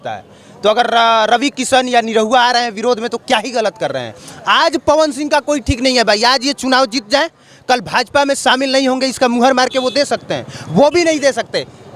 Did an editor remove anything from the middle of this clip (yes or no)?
no